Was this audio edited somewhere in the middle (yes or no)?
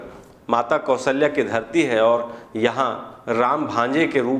no